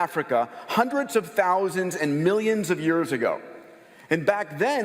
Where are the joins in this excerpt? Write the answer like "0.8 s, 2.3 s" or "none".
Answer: 1.5 s